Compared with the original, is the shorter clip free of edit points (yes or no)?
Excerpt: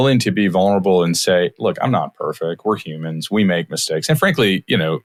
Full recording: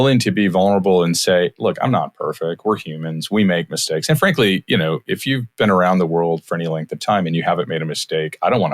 yes